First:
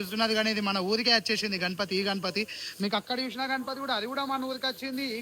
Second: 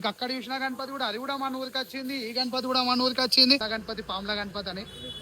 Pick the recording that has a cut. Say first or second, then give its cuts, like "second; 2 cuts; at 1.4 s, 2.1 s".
second; 1 cut; at 3.6 s